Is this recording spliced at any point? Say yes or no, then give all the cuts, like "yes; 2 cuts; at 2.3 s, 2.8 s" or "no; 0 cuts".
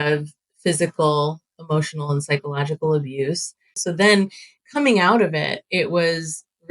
yes; 1 cut; at 3.8 s